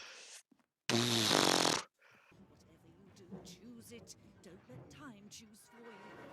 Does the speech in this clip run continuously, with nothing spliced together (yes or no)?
no